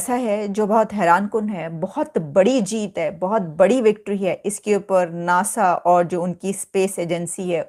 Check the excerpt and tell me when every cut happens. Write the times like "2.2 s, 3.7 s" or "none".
none

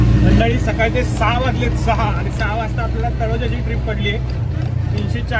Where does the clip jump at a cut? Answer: none

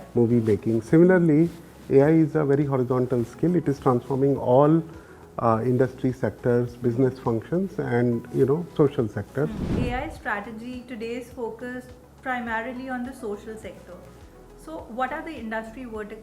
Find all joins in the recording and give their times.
9.7 s

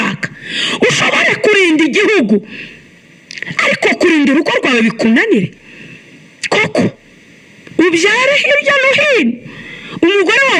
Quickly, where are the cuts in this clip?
none

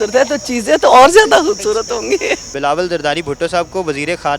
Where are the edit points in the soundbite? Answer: 2.5 s

